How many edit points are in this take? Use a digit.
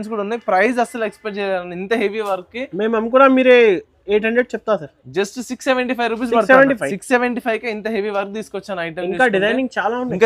0